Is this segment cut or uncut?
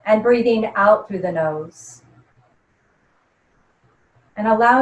cut